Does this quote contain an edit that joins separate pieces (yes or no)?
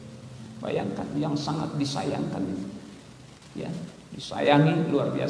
no